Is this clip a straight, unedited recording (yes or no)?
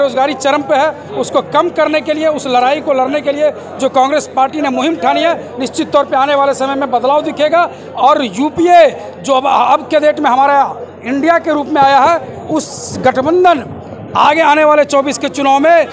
yes